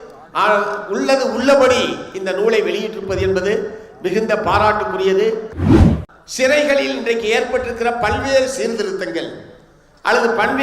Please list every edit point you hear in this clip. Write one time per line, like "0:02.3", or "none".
0:05.7